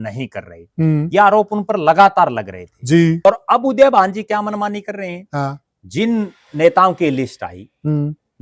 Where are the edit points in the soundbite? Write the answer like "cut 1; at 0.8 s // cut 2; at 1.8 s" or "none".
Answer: cut 1; at 3.2 s

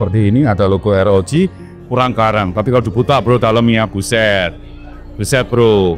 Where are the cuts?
cut 1; at 1.7 s

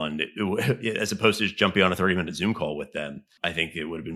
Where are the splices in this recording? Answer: cut 1; at 3.2 s

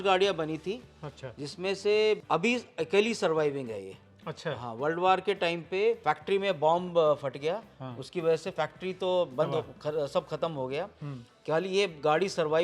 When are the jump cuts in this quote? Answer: cut 1; at 2.2 s // cut 2; at 6.0 s

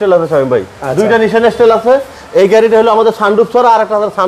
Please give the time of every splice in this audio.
none

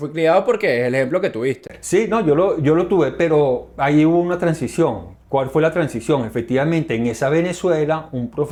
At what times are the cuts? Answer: none

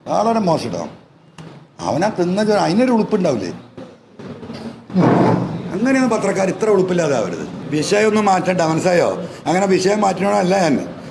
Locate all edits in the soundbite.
cut 1; at 7.5 s

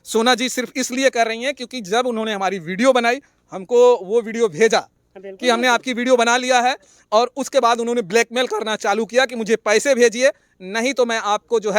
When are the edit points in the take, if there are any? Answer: none

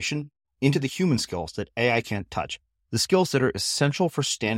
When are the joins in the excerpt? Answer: none

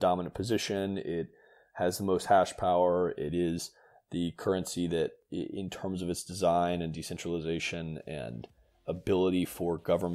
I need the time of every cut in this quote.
cut 1; at 5.2 s // cut 2; at 8.7 s

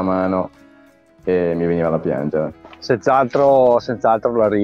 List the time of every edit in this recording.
none

